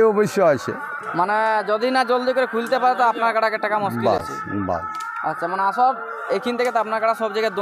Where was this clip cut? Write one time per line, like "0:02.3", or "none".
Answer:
none